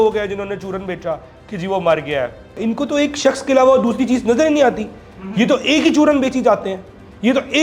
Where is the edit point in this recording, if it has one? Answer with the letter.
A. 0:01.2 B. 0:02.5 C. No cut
B